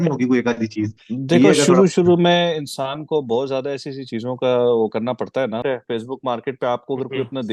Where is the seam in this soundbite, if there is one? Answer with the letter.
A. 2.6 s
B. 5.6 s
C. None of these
B